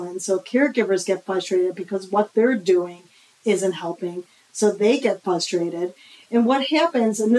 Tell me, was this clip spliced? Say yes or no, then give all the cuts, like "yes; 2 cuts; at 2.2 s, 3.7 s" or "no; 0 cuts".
no; 0 cuts